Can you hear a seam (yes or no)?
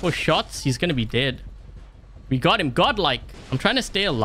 yes